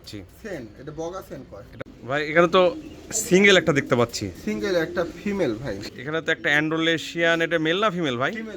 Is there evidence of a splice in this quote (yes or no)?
yes